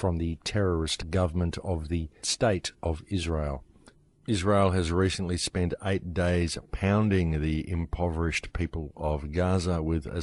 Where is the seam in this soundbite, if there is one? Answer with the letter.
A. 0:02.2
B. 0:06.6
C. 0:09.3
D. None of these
D